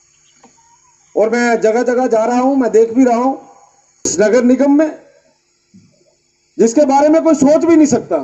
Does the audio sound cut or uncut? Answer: cut